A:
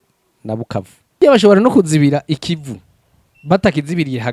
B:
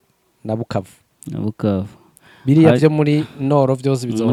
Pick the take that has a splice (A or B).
A